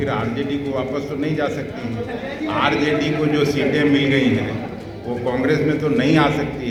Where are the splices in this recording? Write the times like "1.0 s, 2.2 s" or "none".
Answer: none